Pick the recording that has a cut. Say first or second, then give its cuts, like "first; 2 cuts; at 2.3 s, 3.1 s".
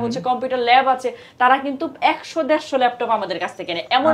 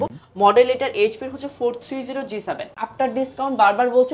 second; 1 cut; at 2.8 s